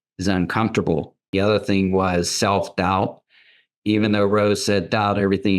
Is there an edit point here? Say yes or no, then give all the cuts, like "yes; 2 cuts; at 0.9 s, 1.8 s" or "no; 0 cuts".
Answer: yes; 1 cut; at 1.3 s